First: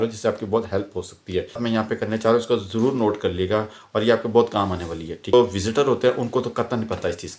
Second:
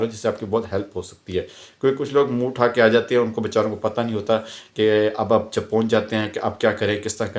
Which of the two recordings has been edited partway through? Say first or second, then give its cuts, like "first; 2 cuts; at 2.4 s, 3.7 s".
first; 2 cuts; at 1.6 s, 5.3 s